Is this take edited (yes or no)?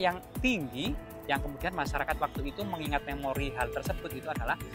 no